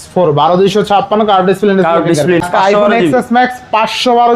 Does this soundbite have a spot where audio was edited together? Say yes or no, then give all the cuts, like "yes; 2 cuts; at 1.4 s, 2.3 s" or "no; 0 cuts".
yes; 1 cut; at 2.4 s